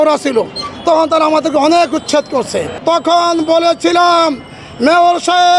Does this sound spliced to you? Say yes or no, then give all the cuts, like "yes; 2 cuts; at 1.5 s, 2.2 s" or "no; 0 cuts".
yes; 1 cut; at 2.7 s